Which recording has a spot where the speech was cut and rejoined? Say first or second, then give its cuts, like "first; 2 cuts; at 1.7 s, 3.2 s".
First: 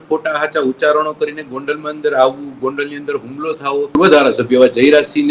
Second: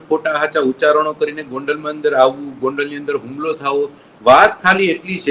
first; 1 cut; at 4.0 s